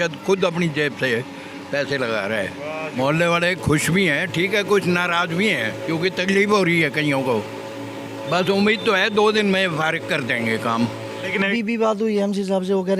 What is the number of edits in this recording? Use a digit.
2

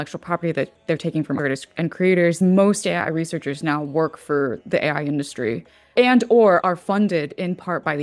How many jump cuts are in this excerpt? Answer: 4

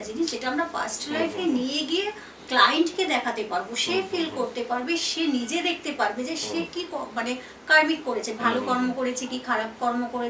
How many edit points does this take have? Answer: 0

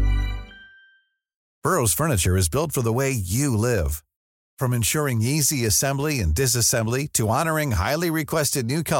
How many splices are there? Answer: 1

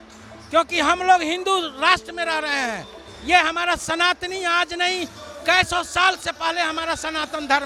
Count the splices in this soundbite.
0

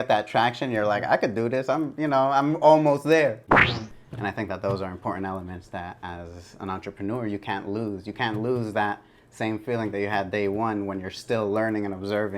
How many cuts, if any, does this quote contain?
1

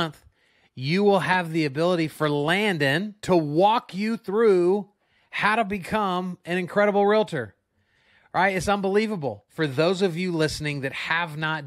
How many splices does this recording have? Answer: 2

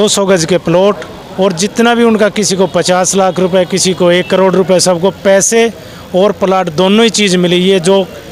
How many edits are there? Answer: 0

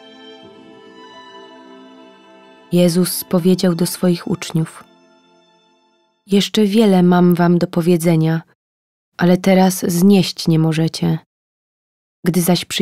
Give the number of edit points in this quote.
1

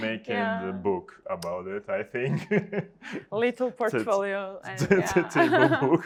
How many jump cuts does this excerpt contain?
0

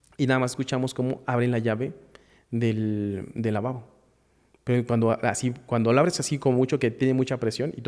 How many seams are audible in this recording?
0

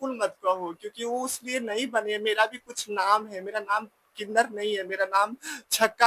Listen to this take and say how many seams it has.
0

